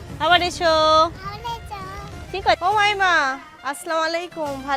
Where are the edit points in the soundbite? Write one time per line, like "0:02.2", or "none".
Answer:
0:02.6